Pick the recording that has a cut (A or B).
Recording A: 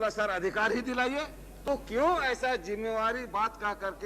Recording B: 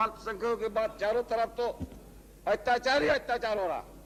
A